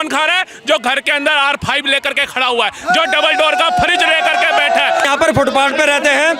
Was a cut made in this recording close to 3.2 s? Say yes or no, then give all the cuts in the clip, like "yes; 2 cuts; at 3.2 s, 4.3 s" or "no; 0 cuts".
no; 1 cut; at 5.0 s